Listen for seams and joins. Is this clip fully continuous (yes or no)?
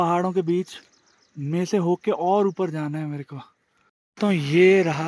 no